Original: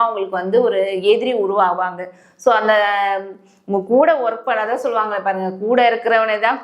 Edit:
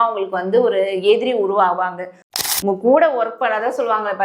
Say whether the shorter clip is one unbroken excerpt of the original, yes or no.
no